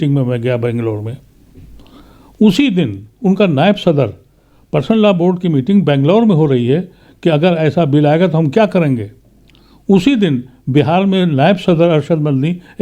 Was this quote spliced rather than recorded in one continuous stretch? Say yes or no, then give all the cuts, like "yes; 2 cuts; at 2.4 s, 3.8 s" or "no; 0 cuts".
no; 0 cuts